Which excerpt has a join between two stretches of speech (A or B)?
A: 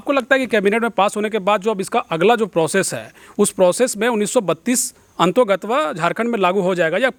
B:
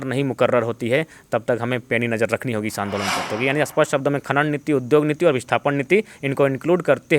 B